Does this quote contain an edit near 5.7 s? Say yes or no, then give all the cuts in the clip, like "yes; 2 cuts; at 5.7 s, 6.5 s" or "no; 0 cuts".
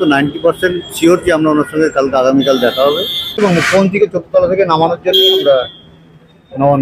no; 1 cut; at 3.4 s